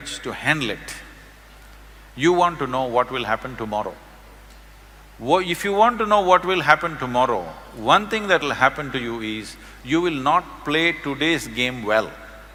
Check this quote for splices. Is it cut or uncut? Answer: uncut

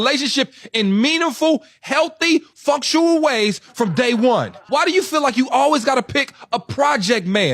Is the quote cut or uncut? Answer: uncut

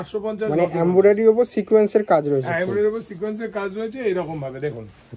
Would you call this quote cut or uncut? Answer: uncut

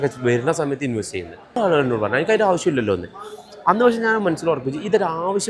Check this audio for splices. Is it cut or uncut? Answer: cut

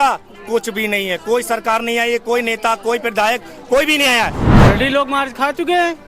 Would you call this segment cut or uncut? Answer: cut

